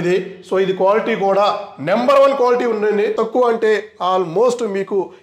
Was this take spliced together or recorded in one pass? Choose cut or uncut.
cut